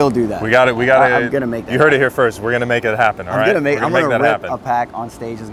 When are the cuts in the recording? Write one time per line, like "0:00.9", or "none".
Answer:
none